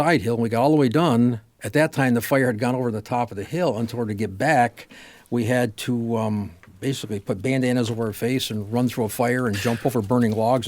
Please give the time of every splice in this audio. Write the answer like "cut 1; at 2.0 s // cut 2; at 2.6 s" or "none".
cut 1; at 1.5 s